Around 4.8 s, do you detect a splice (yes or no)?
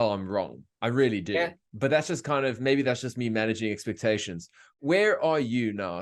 yes